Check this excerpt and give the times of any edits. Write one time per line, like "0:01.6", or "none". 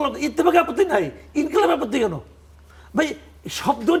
none